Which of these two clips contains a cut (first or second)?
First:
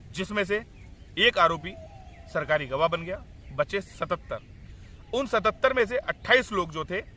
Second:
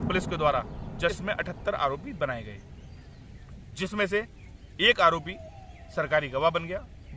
second